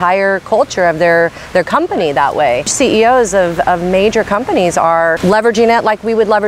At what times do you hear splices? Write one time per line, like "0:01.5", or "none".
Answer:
0:02.7
0:05.2